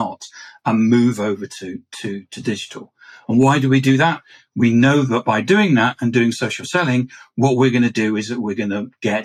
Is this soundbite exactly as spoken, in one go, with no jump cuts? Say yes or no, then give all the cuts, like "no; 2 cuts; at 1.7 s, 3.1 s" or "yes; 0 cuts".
yes; 0 cuts